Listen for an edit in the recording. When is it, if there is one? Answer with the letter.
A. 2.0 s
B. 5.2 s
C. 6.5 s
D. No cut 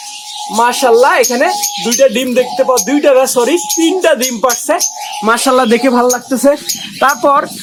D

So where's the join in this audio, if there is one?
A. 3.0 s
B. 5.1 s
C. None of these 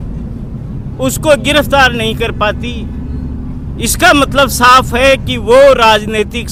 C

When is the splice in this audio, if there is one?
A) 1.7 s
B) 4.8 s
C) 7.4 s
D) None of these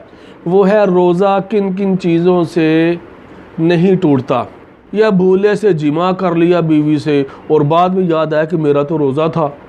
B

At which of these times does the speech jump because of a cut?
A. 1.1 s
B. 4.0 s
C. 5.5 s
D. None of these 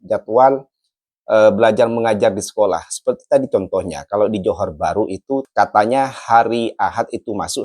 C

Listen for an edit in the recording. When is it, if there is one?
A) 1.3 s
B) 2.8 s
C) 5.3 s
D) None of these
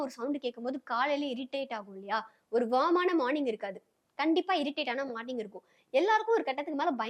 D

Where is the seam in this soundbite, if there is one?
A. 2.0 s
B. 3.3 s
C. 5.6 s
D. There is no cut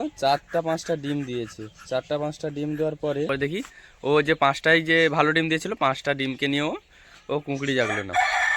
B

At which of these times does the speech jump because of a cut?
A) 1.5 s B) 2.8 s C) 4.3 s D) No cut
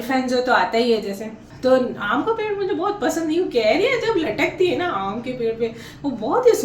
A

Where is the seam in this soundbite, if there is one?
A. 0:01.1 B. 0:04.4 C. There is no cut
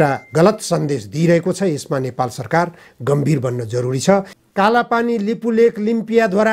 B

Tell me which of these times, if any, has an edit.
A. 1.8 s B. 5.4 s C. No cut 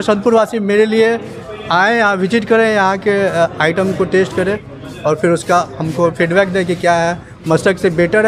C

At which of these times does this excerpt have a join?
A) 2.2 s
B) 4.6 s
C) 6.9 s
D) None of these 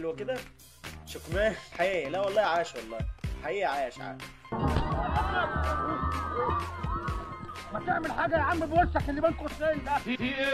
D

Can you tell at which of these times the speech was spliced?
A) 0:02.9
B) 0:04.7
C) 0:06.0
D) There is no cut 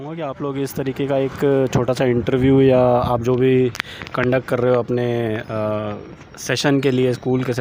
D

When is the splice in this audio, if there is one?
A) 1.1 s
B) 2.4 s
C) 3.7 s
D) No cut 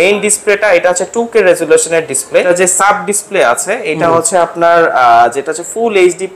B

